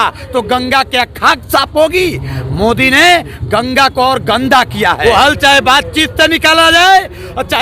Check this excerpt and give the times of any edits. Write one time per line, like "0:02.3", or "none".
0:05.0